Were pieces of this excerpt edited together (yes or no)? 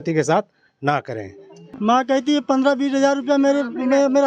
yes